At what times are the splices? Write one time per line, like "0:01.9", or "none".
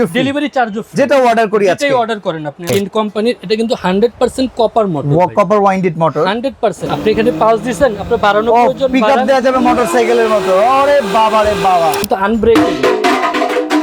0:02.7
0:06.9
0:12.0